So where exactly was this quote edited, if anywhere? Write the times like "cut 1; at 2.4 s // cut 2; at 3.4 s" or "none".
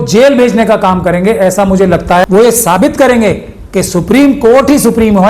cut 1; at 2.3 s

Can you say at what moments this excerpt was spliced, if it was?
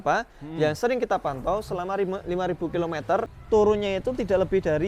cut 1; at 3.3 s

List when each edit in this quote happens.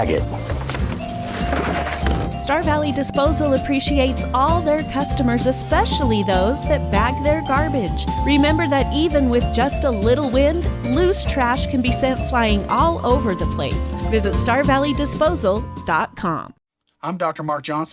cut 1; at 16.8 s

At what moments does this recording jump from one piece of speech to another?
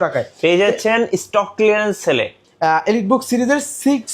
cut 1; at 2.4 s

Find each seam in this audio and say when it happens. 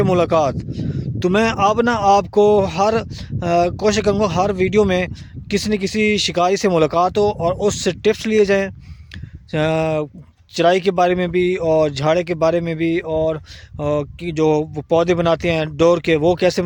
none

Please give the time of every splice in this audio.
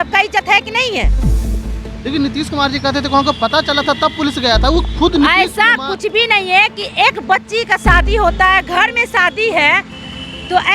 cut 1; at 4.9 s

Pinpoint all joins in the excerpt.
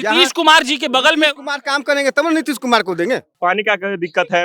cut 1; at 3.3 s

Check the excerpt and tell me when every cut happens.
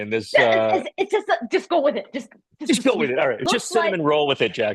cut 1; at 3.4 s

